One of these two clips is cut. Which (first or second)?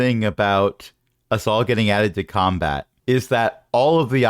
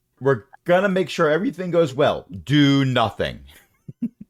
first